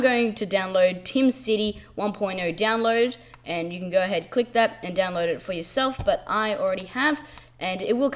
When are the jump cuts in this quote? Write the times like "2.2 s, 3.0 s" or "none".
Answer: 4.2 s